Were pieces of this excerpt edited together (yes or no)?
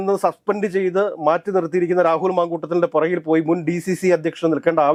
no